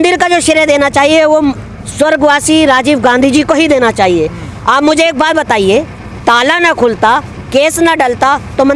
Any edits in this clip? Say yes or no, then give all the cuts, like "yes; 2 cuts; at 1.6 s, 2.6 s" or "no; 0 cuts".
no; 0 cuts